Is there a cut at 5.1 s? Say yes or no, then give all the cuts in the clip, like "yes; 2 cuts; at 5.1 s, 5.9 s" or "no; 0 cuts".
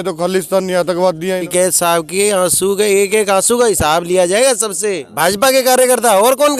yes; 2 cuts; at 1.4 s, 5.1 s